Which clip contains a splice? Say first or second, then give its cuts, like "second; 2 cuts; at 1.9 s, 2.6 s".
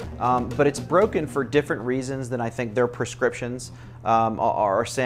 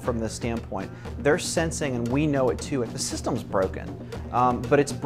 second; 1 cut; at 2.9 s